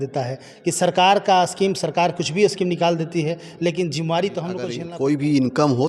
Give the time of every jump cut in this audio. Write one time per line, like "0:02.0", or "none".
0:04.7

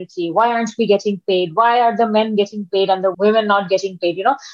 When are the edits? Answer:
0:03.1

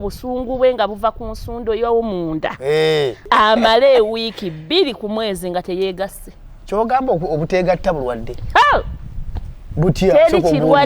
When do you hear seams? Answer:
0:03.2

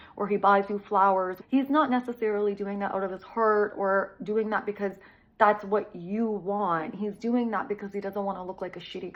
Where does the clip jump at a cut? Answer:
none

